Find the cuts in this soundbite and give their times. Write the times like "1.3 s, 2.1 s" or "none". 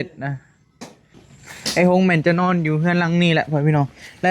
1.2 s